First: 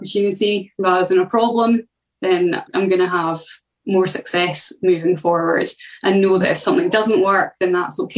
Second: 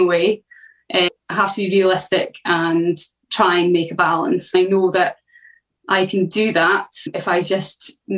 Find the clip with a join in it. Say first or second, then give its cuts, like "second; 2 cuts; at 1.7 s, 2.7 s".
second; 3 cuts; at 1.1 s, 3.1 s, 4.5 s